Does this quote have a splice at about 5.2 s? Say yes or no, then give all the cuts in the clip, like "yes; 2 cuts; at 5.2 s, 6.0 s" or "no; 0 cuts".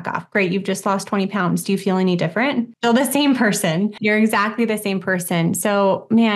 no; 2 cuts; at 2.7 s, 3.9 s